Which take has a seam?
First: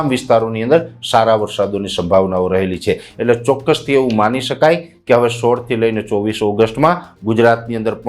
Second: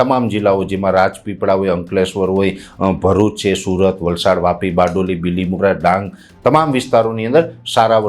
first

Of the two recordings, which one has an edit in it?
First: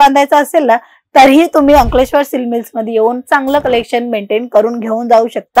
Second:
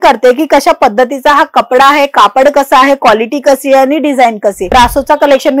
second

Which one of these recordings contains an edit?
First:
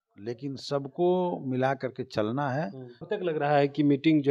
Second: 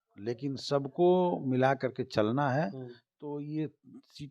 first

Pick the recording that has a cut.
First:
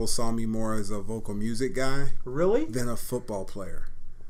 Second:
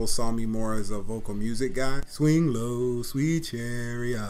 second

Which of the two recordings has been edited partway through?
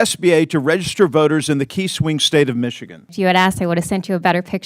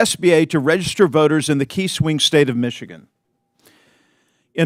first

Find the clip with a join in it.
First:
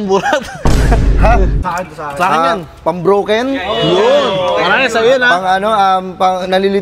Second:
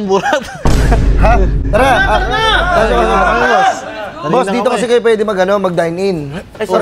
first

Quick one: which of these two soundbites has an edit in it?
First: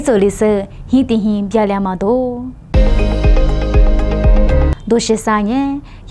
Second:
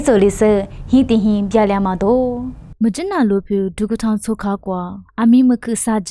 first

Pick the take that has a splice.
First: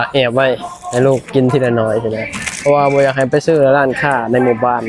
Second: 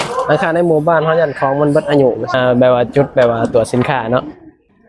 second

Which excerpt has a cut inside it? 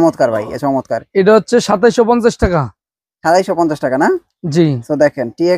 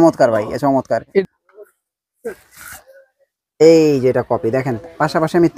second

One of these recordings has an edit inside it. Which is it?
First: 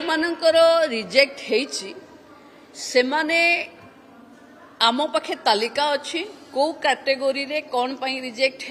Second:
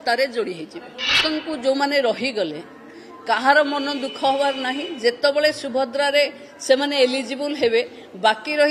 second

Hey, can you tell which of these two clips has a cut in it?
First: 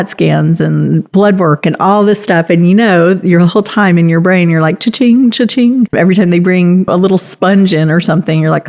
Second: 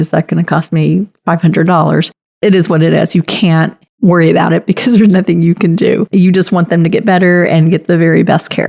first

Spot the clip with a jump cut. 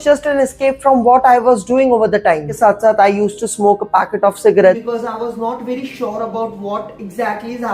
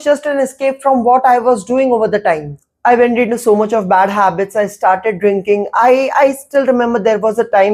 first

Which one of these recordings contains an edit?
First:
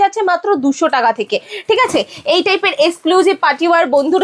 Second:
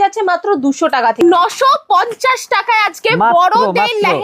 second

